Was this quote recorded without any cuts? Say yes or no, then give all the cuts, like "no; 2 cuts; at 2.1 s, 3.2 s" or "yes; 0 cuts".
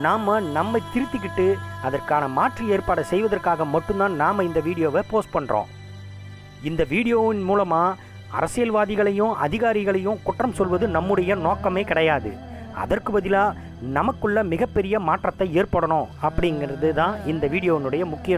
yes; 0 cuts